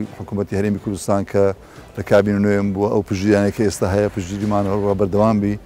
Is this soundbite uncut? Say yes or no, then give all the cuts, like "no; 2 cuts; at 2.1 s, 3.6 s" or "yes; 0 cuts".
yes; 0 cuts